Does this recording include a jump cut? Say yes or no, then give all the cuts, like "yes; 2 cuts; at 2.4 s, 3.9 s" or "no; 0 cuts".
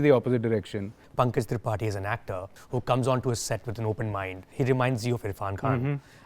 yes; 3 cuts; at 1.0 s, 2.5 s, 4.5 s